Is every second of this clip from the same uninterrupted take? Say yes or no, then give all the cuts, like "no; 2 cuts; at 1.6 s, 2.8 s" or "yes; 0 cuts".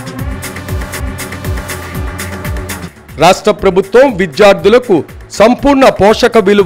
no; 1 cut; at 1.0 s